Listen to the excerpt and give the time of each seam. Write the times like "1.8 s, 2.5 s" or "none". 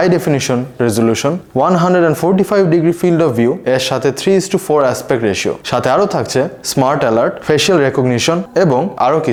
none